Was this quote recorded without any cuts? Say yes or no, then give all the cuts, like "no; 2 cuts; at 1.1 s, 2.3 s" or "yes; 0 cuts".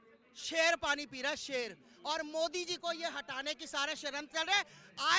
yes; 0 cuts